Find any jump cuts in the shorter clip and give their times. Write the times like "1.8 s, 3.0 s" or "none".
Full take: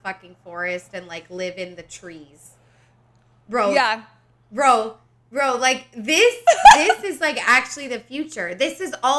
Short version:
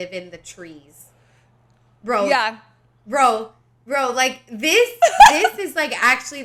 none

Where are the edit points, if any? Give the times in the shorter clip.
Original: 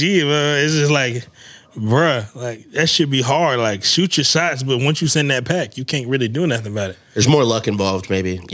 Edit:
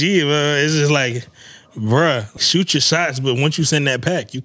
2.4 s

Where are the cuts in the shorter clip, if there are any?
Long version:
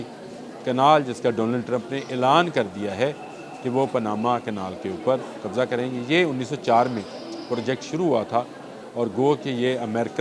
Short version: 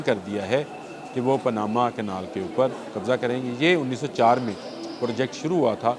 none

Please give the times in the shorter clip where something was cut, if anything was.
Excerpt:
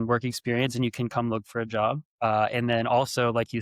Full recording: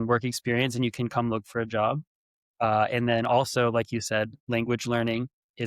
2.1 s

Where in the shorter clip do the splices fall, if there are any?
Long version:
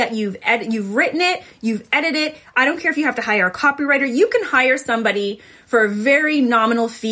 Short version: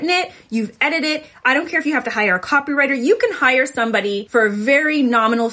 4.2 s

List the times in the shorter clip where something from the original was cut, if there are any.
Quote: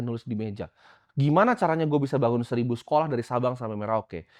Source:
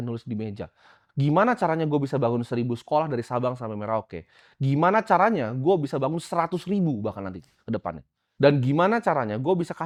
none

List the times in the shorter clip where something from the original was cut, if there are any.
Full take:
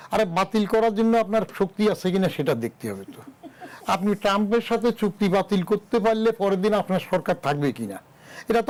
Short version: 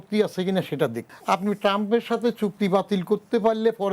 1.1 s

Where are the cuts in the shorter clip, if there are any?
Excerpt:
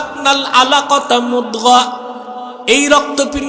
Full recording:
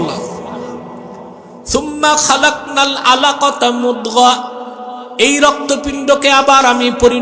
none

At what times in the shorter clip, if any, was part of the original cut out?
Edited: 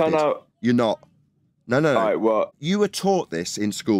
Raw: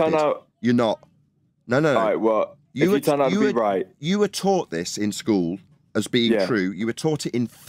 2.6 s

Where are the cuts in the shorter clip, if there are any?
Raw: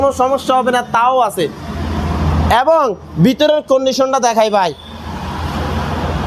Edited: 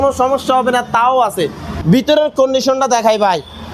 1.7 s

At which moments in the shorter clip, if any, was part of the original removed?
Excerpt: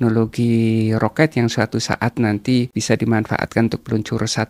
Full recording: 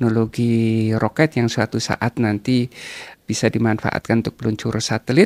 2.7 s

